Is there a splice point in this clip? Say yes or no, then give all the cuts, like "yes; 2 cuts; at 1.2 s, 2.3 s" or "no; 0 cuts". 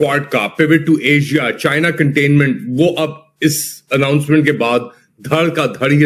no; 0 cuts